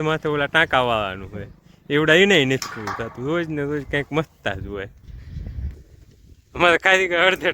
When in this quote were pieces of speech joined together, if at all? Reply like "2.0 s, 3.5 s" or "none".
5.7 s